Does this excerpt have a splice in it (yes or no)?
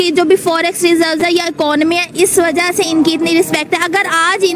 no